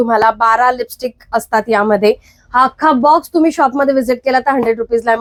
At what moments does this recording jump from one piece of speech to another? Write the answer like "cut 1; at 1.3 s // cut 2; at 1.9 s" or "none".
none